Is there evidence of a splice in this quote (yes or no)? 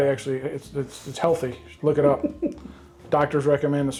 no